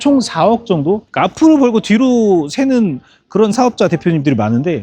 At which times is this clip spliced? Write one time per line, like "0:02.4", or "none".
0:01.1